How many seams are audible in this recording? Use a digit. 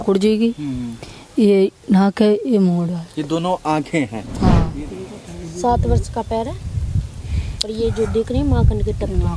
1